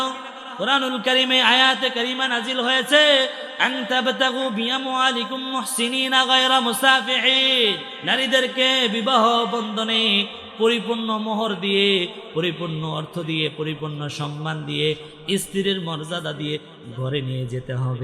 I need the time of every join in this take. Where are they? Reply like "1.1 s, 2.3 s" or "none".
7.9 s